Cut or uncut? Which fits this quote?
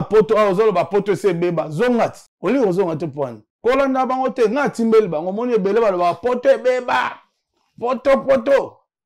cut